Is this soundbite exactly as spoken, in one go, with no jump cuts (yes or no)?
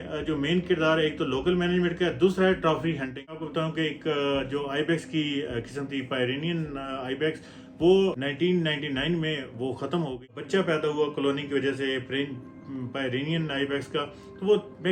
no